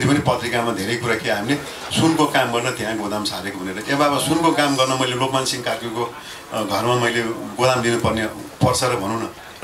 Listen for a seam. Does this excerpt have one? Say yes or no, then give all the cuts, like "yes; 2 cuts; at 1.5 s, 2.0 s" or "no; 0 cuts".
no; 0 cuts